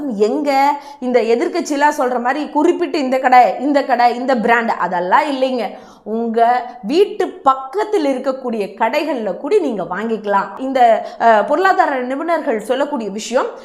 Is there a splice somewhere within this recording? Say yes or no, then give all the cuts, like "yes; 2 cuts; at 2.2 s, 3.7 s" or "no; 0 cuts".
yes; 1 cut; at 10.5 s